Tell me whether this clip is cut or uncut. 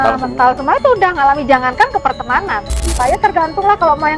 cut